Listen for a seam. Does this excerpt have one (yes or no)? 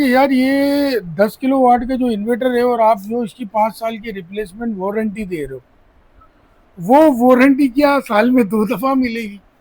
no